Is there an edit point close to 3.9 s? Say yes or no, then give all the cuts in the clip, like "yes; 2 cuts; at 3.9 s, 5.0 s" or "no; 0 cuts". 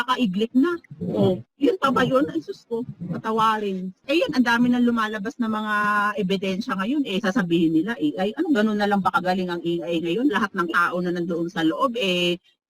yes; 1 cut; at 3.9 s